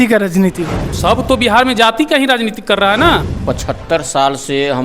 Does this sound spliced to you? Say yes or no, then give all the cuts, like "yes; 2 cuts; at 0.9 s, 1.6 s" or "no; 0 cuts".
yes; 2 cuts; at 1.0 s, 3.3 s